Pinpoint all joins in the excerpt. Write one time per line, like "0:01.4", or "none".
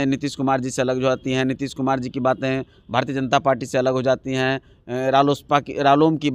none